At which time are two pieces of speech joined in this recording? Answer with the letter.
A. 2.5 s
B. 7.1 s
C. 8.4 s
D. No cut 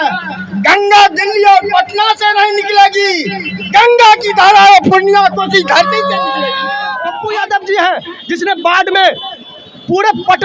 B